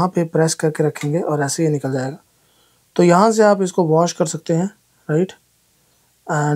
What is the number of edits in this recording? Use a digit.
0